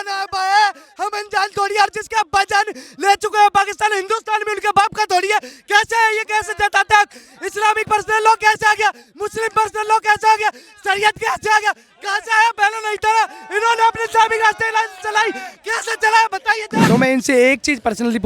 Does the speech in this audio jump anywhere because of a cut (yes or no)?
yes